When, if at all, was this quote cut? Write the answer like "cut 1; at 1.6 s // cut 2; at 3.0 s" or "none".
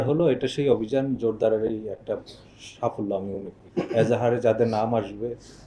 cut 1; at 3.6 s